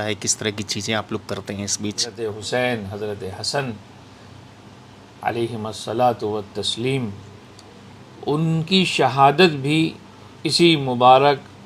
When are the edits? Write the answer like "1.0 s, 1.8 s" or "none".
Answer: 2.2 s